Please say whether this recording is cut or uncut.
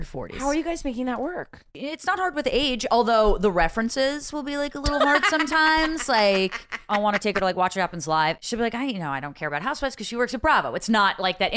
cut